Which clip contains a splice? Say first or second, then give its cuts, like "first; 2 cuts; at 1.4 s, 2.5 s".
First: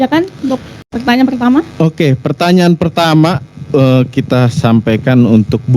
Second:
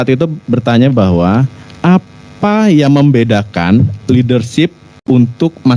second; 1 cut; at 4.9 s